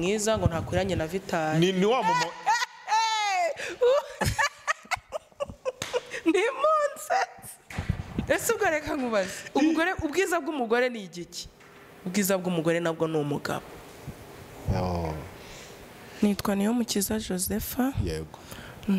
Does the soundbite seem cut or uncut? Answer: cut